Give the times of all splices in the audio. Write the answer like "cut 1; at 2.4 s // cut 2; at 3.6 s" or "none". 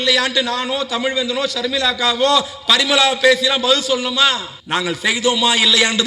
cut 1; at 4.5 s

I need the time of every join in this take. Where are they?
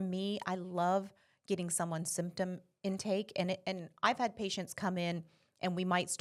none

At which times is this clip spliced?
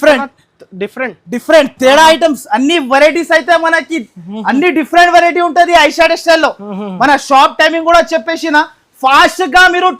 none

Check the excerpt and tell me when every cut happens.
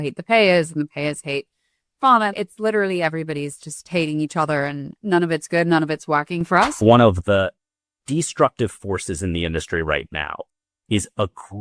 cut 1; at 4.9 s // cut 2; at 6.8 s

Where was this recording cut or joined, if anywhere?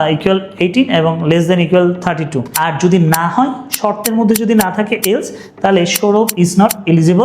cut 1; at 2.4 s

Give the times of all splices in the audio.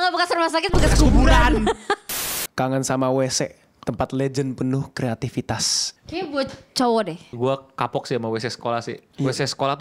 cut 1; at 2.4 s // cut 2; at 5.8 s // cut 3; at 7.3 s

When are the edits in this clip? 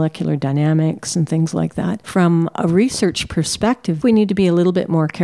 cut 1; at 4.0 s

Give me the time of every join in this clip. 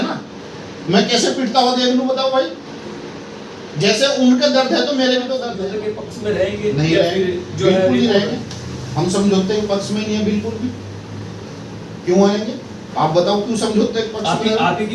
cut 1; at 5.6 s

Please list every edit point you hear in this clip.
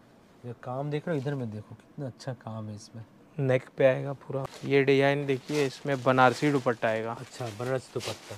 cut 1; at 4.4 s

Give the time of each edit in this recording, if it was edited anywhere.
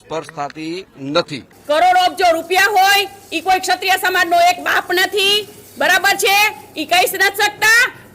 cut 1; at 1.5 s

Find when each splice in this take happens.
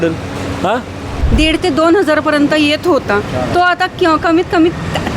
cut 1; at 1.2 s

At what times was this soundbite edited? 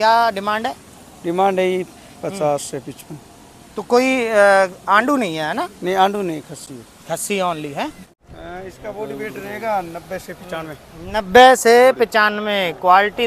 cut 1; at 8.1 s

